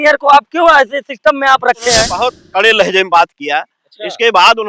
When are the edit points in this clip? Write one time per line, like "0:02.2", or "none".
0:02.1